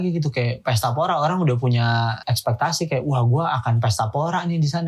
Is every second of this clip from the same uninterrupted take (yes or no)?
no